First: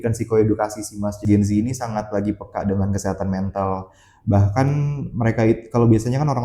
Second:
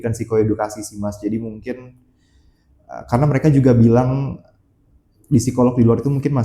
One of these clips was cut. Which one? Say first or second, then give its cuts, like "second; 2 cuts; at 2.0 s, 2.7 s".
first; 1 cut; at 1.2 s